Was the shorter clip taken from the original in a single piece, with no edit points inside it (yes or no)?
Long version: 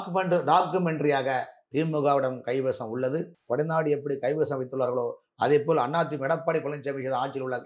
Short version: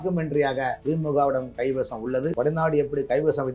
no